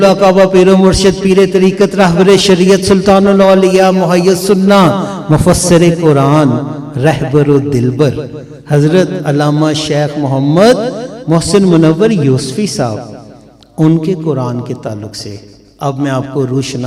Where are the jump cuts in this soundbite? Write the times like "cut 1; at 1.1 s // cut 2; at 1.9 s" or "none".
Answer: none